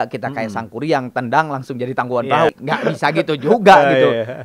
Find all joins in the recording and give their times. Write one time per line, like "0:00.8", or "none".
0:02.5